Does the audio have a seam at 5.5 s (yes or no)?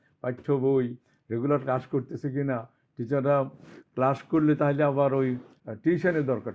yes